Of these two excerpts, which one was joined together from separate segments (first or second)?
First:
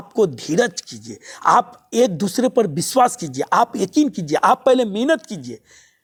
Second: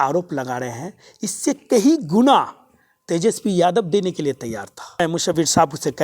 second